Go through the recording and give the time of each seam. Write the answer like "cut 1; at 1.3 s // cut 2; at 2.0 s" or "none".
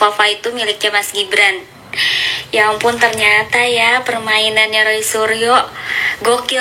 none